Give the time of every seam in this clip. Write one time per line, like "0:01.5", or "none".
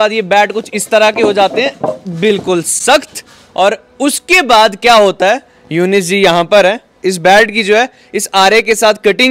none

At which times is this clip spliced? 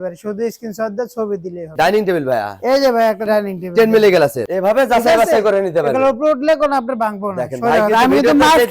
0:01.7
0:04.4

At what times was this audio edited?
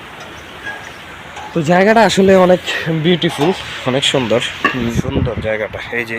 0:04.9

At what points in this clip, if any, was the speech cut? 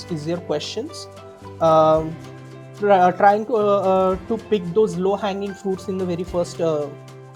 none

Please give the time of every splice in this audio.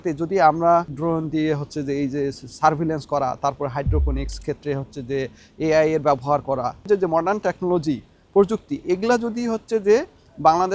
0:00.9
0:06.8

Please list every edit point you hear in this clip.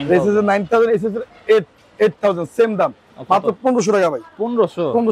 none

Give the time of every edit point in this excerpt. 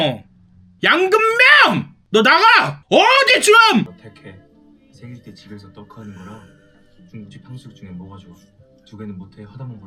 0:04.0

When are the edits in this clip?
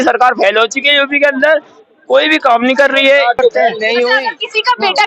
0:04.2

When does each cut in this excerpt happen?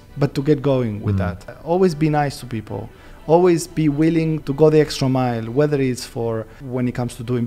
0:01.5
0:04.4
0:06.6

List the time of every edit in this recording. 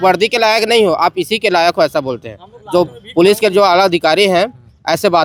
none

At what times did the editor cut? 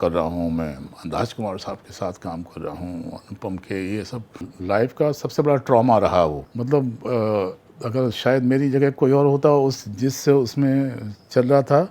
0:04.4
0:06.5

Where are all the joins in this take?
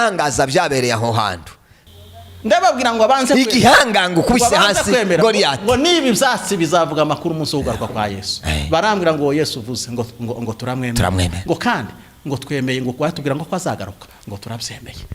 0:01.7

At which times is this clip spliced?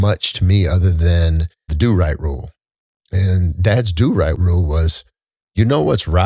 0:01.7
0:04.4

